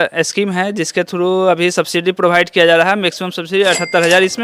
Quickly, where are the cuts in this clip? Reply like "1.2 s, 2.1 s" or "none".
none